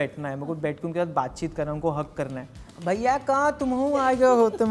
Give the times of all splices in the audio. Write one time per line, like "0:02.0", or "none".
0:02.7